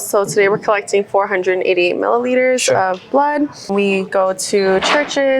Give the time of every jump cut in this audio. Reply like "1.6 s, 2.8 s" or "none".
3.6 s